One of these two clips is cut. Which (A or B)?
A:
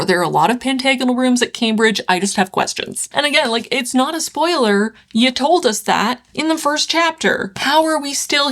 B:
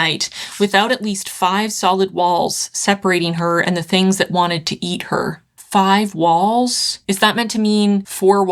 A